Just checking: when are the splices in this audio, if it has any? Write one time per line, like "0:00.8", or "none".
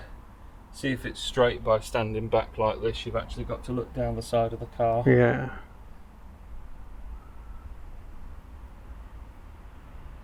none